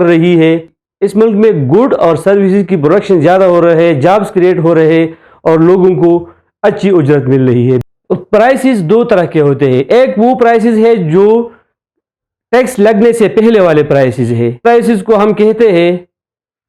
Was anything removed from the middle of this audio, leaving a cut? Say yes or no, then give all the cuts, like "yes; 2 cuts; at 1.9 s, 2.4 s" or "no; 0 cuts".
yes; 1 cut; at 7.8 s